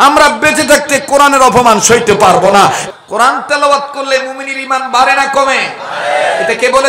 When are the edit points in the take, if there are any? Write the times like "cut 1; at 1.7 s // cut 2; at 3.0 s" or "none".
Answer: cut 1; at 2.9 s